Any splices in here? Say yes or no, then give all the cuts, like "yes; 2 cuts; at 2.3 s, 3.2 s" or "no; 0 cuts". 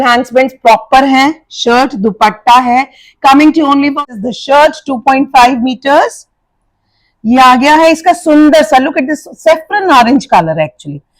yes; 1 cut; at 4.0 s